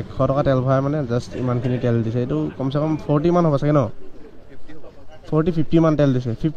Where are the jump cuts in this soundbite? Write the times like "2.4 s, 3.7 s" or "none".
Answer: none